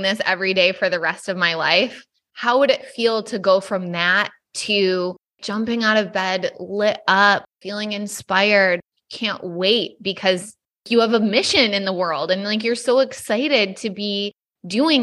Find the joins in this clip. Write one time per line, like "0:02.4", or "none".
none